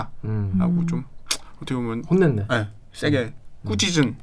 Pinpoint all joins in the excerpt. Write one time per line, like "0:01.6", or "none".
none